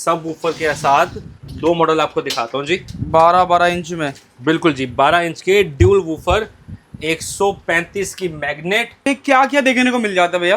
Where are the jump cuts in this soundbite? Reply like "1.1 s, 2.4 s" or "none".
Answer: 9.0 s